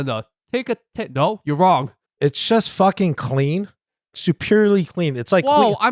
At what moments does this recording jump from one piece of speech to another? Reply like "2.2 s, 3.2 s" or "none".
2.0 s